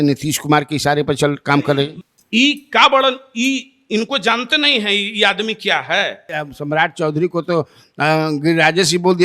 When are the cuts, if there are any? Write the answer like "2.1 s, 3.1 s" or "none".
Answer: 2.0 s, 6.3 s